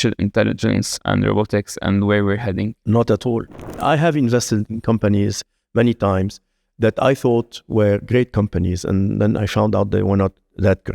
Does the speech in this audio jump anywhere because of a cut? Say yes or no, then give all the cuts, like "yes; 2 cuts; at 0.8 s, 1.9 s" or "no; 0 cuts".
yes; 1 cut; at 3.8 s